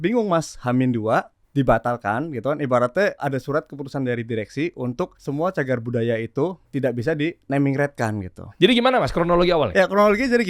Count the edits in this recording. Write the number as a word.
five